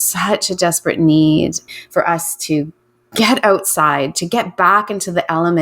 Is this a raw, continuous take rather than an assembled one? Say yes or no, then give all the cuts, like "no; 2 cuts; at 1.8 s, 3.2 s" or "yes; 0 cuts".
no; 1 cut; at 1.7 s